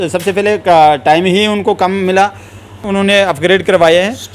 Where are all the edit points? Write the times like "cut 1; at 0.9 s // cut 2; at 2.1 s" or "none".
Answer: cut 1; at 2.8 s